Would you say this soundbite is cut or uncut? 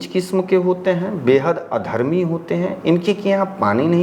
uncut